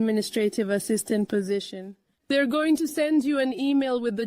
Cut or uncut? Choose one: uncut